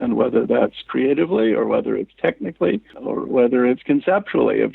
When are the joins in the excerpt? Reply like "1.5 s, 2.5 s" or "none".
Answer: 2.9 s